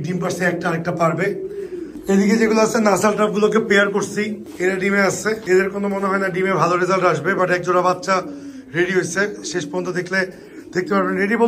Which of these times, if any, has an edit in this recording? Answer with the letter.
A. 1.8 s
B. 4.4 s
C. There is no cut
A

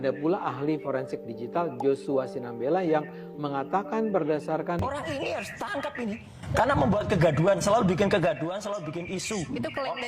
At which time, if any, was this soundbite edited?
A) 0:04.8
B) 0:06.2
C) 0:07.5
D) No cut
A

